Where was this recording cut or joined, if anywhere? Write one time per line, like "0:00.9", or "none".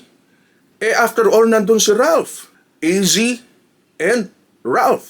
0:02.5